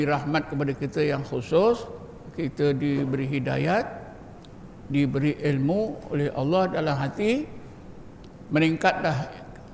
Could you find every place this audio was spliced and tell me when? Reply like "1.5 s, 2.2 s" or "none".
none